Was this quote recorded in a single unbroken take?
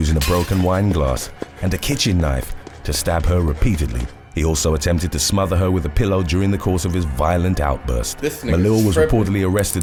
yes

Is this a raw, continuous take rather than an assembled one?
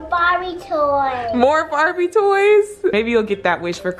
no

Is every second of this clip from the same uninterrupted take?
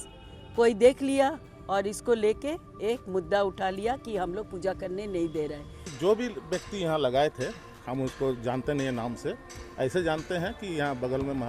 no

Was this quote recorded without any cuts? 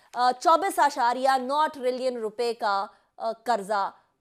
yes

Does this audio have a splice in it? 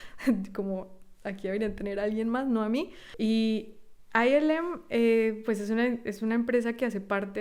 yes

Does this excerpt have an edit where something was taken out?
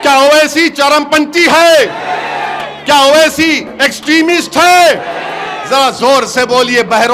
no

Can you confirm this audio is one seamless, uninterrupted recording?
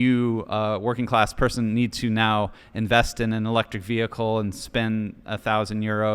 yes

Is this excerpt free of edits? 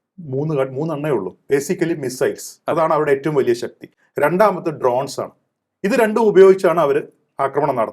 yes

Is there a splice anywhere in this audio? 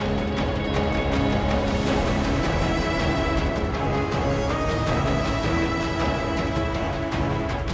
no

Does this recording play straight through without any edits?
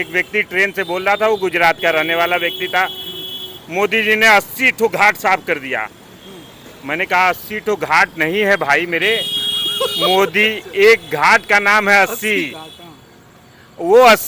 yes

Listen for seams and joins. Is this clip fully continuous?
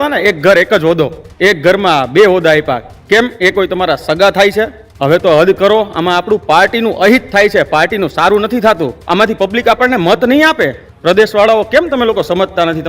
no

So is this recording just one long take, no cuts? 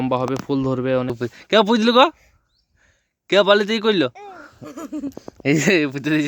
no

